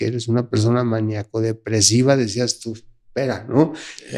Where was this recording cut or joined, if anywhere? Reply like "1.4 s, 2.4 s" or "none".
none

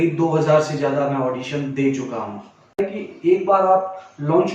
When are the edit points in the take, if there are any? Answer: 3.0 s

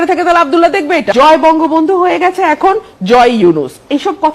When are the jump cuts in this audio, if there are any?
1.1 s

